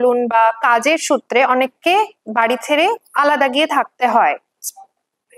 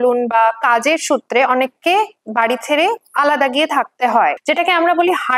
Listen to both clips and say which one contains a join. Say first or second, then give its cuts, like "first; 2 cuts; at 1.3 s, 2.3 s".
second; 1 cut; at 4.4 s